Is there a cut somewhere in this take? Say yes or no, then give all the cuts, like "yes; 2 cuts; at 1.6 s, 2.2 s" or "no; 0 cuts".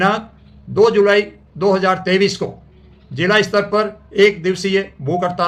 no; 0 cuts